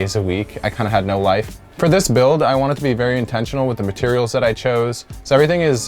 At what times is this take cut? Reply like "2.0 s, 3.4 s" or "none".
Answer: 1.6 s

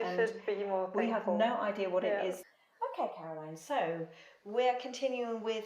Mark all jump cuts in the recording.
2.4 s

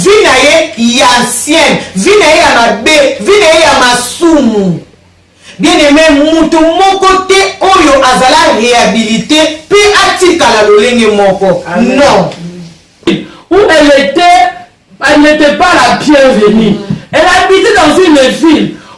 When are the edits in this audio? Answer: 13.1 s

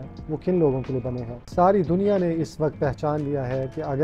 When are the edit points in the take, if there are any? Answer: 1.3 s

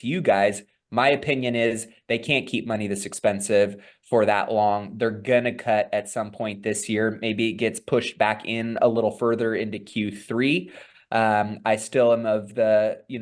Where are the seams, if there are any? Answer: none

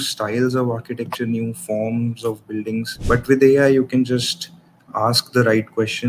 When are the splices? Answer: 2.9 s

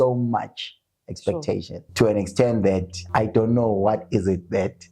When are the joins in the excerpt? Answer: 1.9 s, 3.0 s

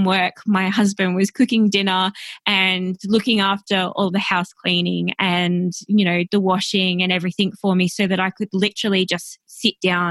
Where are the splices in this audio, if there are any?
none

